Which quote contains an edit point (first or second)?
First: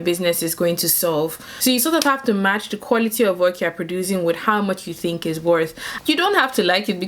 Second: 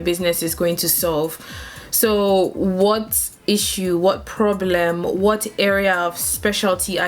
first